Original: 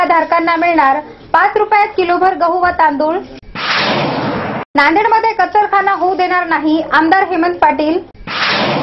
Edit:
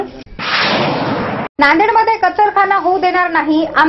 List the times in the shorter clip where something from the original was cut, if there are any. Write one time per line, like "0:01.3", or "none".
none